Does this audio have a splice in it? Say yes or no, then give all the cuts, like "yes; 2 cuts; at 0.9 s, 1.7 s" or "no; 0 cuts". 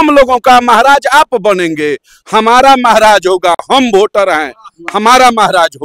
no; 0 cuts